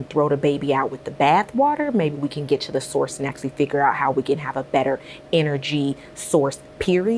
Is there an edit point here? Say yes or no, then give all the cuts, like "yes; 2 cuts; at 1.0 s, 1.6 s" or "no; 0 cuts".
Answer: no; 0 cuts